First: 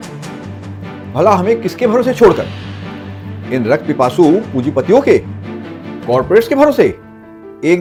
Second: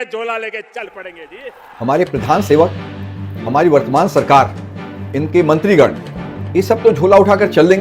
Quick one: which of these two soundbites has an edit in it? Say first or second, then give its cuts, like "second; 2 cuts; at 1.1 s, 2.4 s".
second; 1 cut; at 1.7 s